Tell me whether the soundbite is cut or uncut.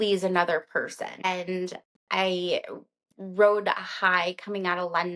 cut